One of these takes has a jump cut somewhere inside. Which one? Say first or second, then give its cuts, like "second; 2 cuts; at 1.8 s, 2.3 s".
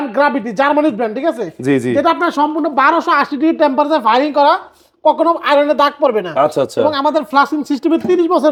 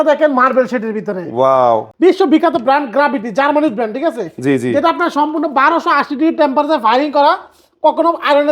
second; 1 cut; at 1.9 s